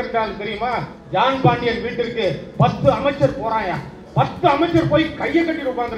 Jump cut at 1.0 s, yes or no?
yes